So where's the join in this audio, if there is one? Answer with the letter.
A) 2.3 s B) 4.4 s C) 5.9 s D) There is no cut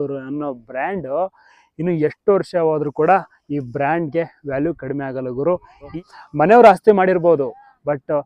C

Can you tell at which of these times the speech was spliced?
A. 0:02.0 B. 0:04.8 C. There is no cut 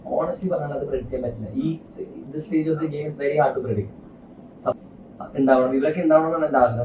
B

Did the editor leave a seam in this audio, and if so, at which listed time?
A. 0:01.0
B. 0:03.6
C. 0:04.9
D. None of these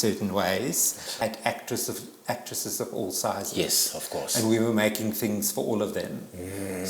A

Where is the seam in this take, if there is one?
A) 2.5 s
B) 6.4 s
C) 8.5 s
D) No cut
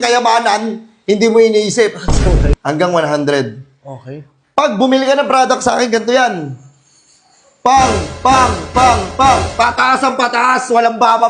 A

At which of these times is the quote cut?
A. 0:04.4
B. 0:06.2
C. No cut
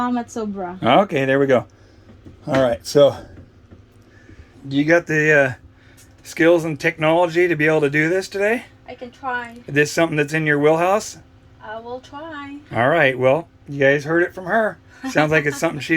A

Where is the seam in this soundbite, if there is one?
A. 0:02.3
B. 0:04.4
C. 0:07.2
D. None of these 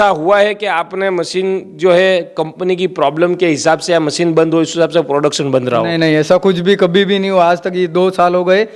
D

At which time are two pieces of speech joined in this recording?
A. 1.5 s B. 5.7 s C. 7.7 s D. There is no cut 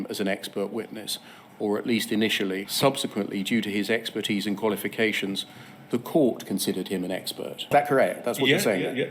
C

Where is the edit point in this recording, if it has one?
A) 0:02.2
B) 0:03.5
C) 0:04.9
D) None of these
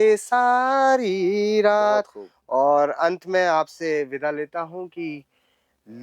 D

